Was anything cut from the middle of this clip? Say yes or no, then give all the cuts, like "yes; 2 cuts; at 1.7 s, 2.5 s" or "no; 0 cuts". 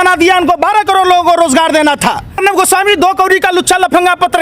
yes; 1 cut; at 2.4 s